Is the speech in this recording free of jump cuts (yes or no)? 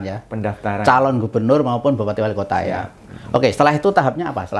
yes